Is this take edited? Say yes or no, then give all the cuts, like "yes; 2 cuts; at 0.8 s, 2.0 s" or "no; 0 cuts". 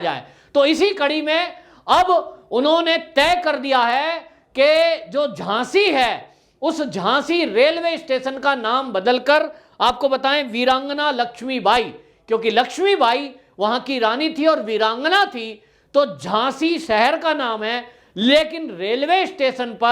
no; 0 cuts